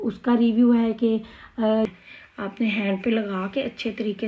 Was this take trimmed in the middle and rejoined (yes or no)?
yes